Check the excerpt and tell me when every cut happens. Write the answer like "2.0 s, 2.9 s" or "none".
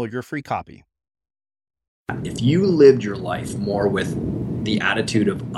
2.1 s